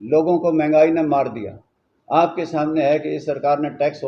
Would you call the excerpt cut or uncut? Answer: uncut